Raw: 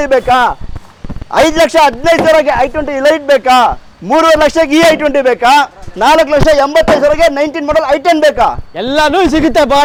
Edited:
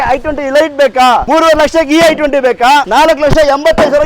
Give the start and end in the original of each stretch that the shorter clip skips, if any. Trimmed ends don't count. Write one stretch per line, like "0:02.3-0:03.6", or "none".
0:03.7-0:04.1
0:05.7-0:06.0